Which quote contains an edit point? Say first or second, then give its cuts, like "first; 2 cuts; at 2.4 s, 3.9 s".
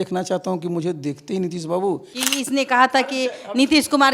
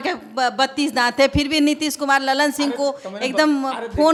first; 1 cut; at 2.1 s